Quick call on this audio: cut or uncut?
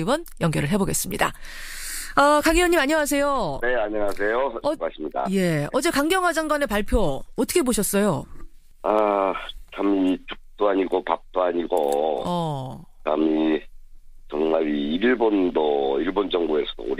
cut